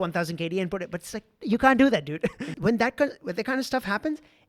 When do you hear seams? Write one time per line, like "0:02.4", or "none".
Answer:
0:02.5